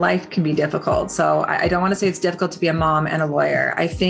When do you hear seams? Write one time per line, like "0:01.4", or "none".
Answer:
none